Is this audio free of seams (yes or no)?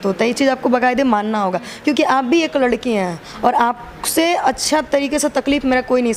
yes